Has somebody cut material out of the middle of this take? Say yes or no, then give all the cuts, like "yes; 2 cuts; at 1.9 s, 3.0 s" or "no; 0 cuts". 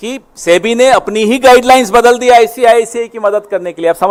no; 0 cuts